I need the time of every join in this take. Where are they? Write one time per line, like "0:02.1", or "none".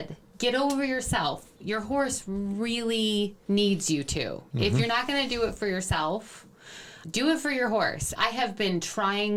none